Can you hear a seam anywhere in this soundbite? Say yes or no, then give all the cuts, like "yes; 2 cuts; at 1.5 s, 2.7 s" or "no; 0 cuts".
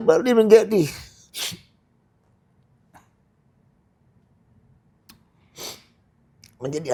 no; 0 cuts